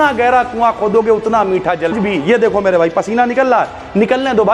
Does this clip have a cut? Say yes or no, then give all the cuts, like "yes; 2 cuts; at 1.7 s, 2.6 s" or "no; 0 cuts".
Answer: yes; 1 cut; at 1.9 s